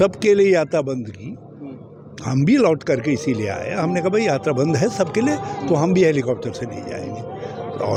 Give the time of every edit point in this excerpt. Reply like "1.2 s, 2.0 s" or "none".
none